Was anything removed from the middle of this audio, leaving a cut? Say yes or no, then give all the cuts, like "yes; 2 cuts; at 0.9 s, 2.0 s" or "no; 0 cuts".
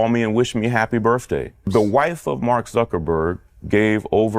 yes; 1 cut; at 1.6 s